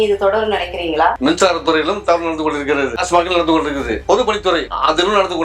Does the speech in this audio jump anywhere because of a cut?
yes; 1 cut; at 4.0 s

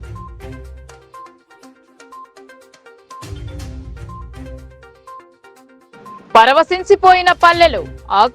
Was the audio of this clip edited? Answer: no; 0 cuts

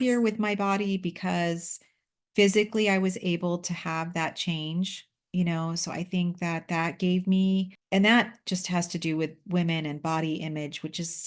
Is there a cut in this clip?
no; 0 cuts

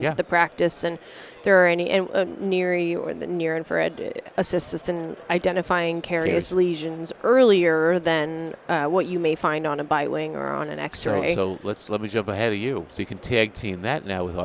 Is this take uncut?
no; 1 cut; at 13.0 s

